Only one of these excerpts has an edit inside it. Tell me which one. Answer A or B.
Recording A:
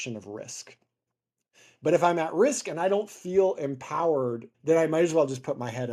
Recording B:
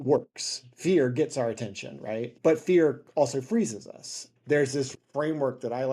B